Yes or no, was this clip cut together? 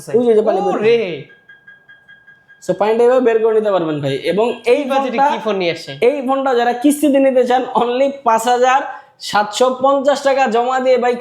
no